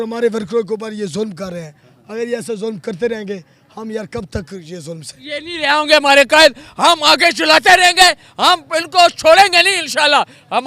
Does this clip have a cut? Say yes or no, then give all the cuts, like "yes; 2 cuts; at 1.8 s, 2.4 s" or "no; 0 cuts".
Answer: yes; 1 cut; at 5.1 s